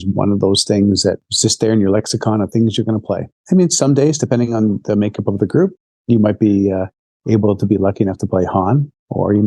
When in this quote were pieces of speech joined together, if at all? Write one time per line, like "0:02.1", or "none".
0:01.3
0:03.3

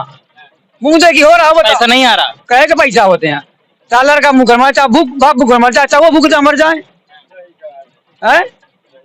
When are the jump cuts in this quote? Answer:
none

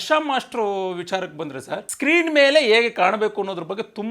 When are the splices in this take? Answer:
0:01.9

